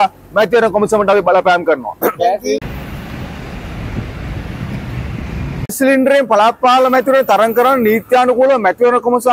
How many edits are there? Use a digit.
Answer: 1